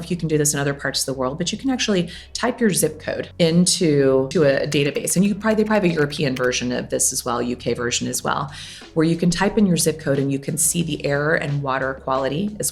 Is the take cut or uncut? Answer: cut